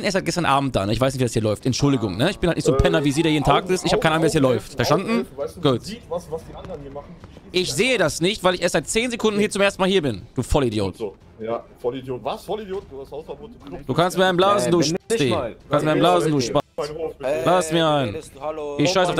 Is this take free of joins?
yes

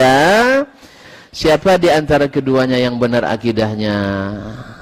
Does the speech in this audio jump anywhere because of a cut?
no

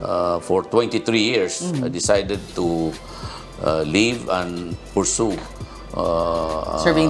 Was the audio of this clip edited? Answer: no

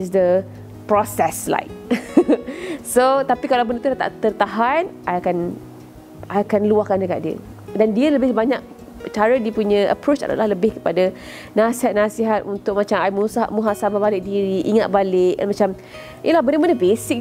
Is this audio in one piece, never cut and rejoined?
yes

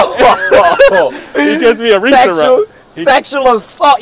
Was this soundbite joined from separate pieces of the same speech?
no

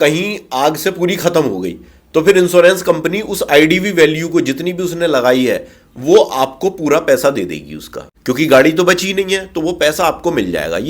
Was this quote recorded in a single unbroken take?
yes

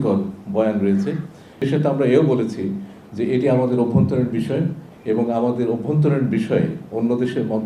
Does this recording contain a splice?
yes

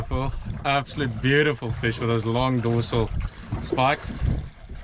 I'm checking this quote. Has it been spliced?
no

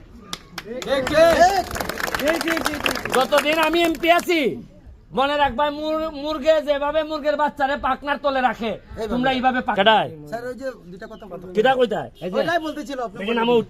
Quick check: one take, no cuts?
no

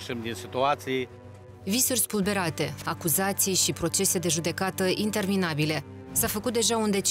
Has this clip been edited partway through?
yes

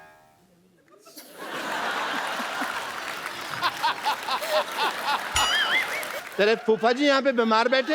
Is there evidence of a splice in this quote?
yes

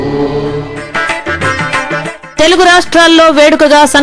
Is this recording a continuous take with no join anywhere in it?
no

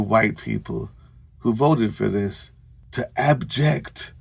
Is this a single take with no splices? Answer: yes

